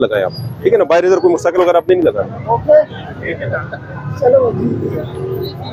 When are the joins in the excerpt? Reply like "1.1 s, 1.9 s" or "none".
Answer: none